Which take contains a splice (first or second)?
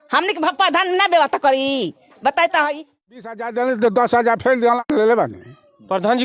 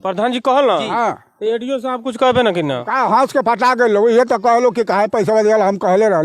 first